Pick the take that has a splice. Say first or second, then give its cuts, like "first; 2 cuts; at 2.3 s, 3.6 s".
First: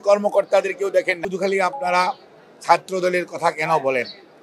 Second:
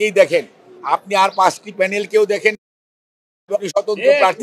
first; 1 cut; at 1.2 s